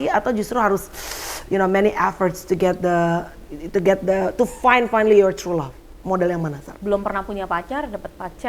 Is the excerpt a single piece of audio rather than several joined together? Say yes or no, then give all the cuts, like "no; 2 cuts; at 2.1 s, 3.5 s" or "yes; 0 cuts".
no; 1 cut; at 6.7 s